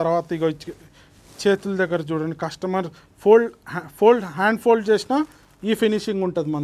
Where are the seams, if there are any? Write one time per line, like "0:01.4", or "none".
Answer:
none